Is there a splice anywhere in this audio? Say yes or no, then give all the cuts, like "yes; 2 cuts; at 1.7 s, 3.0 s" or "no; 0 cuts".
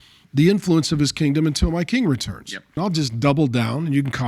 yes; 1 cut; at 2.8 s